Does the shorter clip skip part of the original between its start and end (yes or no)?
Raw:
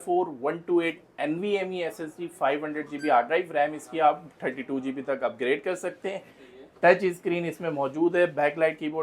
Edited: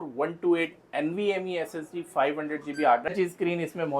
yes